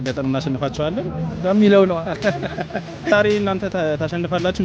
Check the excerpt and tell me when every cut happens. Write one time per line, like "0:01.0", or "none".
0:03.1